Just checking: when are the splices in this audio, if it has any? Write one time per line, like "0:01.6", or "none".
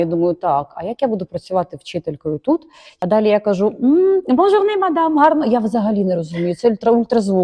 0:02.8